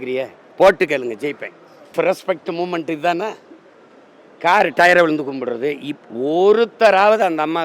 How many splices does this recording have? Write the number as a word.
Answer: one